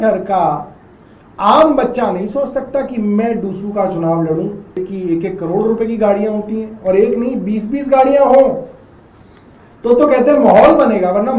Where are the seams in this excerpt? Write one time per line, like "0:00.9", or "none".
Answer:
0:04.7